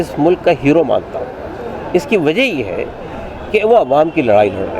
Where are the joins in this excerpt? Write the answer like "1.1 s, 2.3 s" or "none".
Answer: none